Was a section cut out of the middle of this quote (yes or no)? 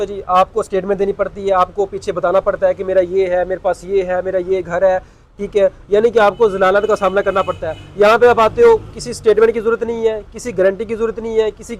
no